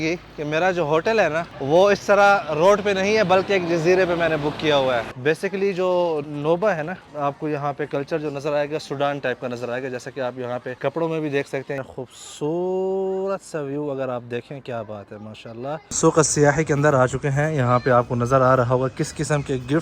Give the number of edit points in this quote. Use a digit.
7